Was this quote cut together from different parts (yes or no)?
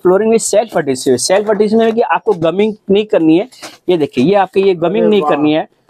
no